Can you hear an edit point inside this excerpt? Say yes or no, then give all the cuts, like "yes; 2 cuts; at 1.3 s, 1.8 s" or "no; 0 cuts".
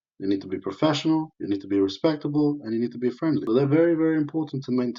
yes; 1 cut; at 3.4 s